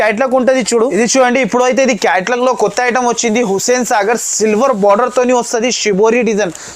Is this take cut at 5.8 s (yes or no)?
no